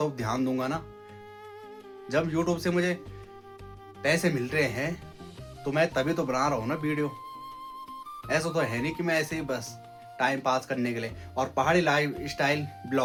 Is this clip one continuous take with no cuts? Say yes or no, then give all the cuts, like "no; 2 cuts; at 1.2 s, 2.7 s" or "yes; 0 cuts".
yes; 0 cuts